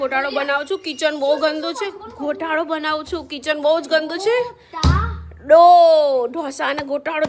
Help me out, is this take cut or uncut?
uncut